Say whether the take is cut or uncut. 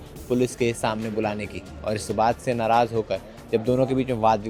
uncut